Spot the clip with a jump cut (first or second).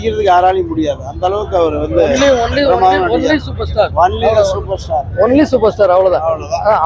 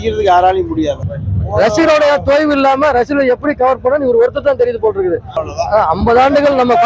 second